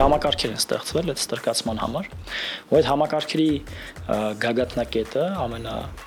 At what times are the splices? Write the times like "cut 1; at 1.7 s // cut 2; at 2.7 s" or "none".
none